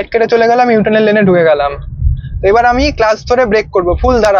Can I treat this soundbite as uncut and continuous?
yes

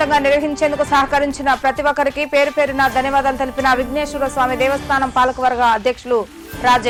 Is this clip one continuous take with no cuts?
yes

